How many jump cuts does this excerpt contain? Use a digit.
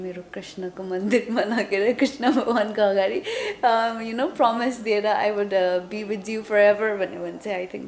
0